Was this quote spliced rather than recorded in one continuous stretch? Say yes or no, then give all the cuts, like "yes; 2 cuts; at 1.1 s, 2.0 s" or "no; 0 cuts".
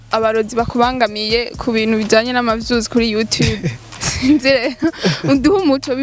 no; 0 cuts